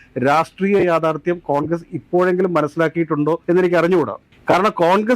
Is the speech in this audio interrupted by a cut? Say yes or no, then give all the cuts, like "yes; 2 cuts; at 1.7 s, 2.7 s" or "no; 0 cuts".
no; 0 cuts